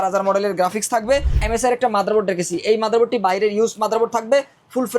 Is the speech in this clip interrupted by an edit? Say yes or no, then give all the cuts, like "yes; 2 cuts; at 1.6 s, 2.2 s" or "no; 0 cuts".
yes; 1 cut; at 1.4 s